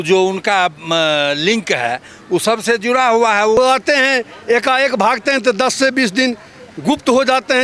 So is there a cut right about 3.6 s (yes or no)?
yes